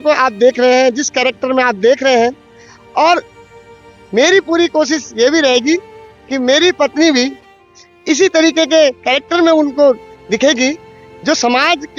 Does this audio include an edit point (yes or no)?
no